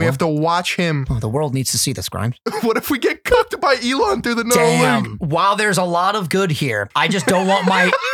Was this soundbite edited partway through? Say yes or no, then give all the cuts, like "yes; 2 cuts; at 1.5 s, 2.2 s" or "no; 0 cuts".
yes; 2 cuts; at 5.2 s, 6.9 s